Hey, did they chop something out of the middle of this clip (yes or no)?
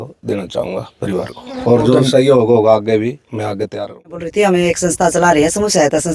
yes